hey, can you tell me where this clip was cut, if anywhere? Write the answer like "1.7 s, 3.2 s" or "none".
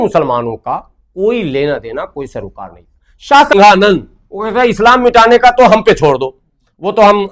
3.5 s